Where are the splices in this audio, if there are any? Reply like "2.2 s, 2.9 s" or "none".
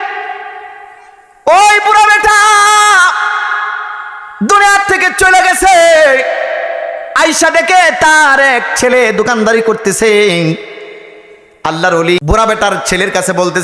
12.2 s

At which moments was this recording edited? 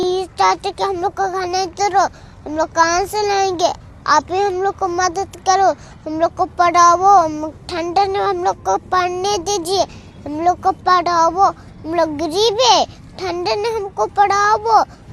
none

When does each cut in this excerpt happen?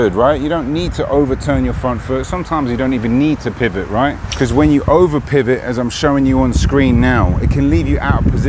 none

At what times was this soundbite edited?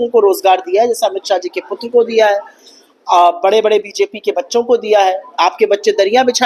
none

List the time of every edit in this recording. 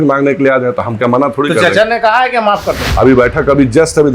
2.9 s

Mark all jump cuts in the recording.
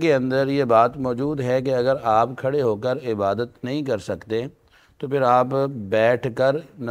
none

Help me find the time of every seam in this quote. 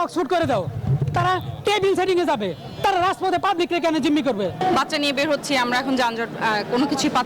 4.6 s

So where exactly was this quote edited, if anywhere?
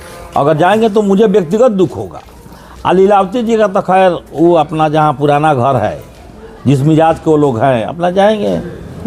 none

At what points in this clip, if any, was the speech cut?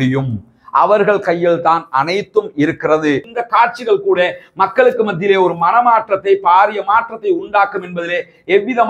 3.2 s

